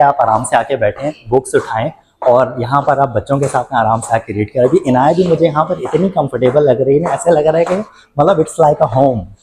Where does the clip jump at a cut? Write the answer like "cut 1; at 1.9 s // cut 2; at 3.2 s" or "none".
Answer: none